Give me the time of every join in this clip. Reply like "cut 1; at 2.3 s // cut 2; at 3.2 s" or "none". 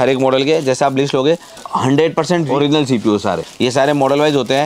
cut 1; at 1.6 s // cut 2; at 2.5 s // cut 3; at 3.5 s